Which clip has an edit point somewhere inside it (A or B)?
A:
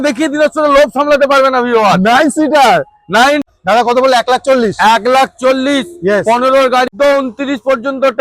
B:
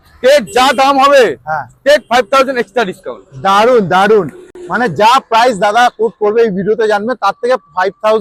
A